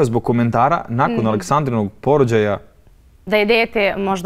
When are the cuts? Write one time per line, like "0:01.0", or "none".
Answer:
none